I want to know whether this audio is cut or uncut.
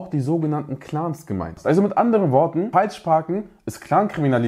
cut